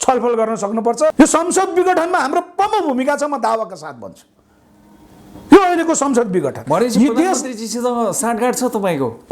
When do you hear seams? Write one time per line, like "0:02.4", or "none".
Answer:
0:01.1